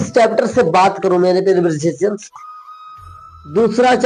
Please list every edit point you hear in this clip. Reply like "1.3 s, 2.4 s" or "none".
none

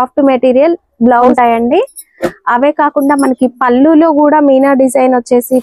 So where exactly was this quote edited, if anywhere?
1.3 s

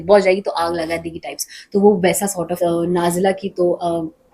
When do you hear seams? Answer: 2.5 s

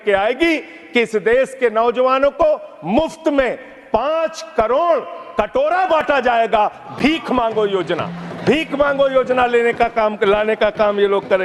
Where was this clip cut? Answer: none

